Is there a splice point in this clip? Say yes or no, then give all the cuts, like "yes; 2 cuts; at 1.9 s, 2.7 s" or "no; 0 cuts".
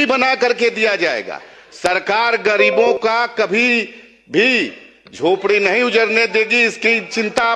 no; 0 cuts